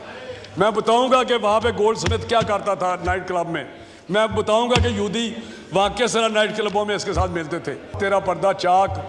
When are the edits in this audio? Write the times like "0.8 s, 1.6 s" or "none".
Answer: 7.9 s